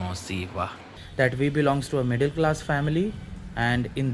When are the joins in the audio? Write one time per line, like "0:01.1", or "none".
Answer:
0:01.0